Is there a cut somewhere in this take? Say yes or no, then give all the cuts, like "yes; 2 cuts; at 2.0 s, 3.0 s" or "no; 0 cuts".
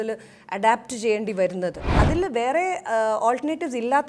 yes; 1 cut; at 2.0 s